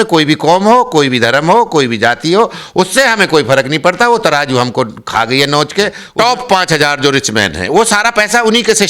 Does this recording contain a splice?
yes; 1 cut; at 6.0 s

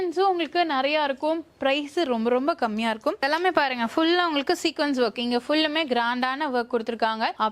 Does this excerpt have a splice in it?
yes; 1 cut; at 3.2 s

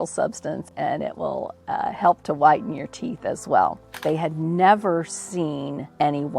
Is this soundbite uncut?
no; 1 cut; at 4.0 s

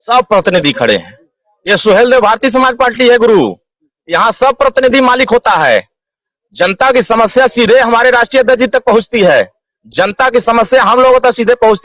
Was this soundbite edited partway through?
no; 0 cuts

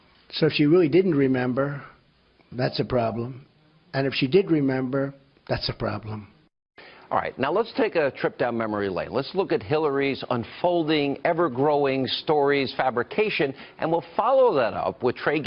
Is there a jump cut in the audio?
no; 0 cuts

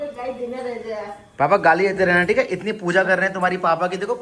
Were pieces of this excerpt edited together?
no; 0 cuts

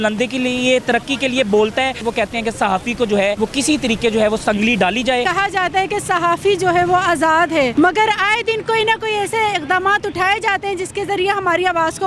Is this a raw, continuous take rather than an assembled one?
no; 4 cuts; at 2.0 s, 3.4 s, 5.3 s, 7.7 s

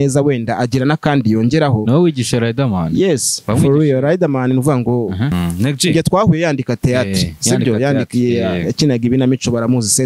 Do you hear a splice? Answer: yes; 1 cut; at 5.3 s

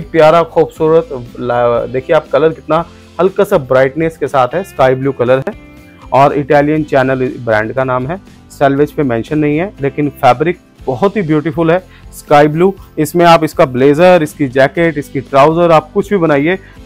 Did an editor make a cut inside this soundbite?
no; 0 cuts

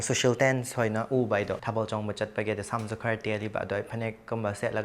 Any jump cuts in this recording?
yes; 1 cut; at 1.6 s

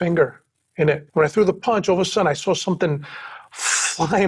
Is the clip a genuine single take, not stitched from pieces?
no; 1 cut; at 1.0 s

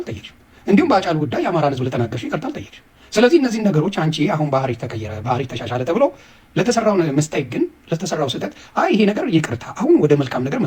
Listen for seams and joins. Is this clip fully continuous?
yes; 0 cuts

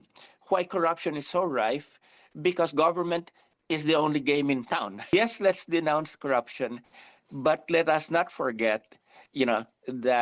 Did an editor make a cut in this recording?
no; 0 cuts

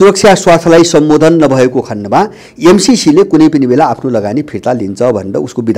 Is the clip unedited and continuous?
yes; 0 cuts

